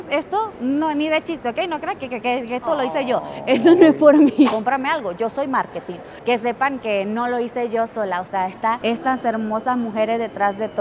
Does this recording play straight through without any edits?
no; 2 cuts; at 4.5 s, 6.2 s

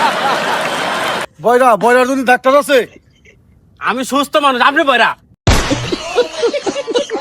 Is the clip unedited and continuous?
no; 2 cuts; at 1.3 s, 5.3 s

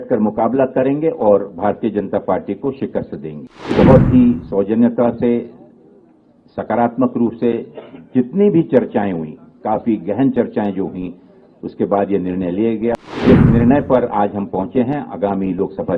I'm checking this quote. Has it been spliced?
yes; 2 cuts; at 3.7 s, 13.0 s

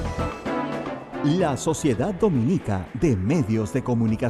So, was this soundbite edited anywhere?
yes; 1 cut; at 1.0 s

